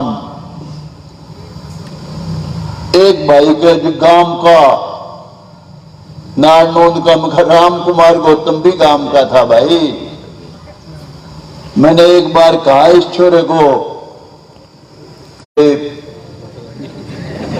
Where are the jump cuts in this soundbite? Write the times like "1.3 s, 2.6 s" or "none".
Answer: 15.6 s